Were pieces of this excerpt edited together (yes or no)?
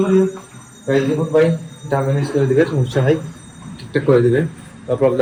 no